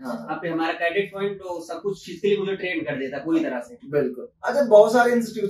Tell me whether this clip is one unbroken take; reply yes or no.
yes